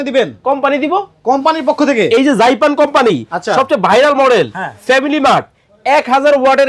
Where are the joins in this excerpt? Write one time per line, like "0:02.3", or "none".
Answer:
none